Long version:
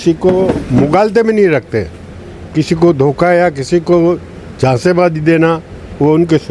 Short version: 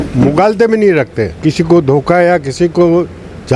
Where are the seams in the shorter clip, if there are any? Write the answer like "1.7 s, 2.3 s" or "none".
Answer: 1.2 s